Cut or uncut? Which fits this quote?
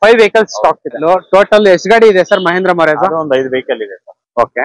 cut